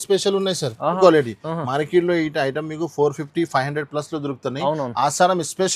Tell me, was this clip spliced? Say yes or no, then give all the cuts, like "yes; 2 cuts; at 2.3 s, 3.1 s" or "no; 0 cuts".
yes; 1 cut; at 1.0 s